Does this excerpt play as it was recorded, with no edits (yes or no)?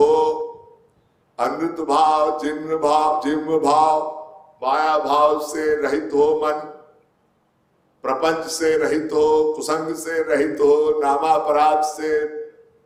yes